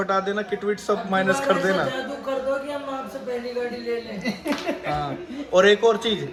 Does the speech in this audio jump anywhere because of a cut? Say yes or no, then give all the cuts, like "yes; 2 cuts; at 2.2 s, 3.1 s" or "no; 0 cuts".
no; 0 cuts